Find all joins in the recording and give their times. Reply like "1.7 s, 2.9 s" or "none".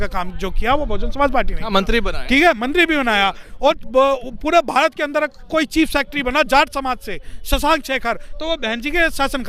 none